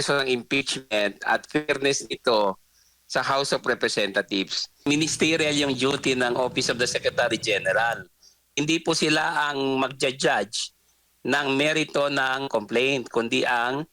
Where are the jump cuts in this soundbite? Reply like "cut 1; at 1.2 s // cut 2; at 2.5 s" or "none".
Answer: cut 1; at 4.8 s